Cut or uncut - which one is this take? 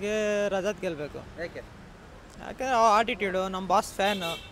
uncut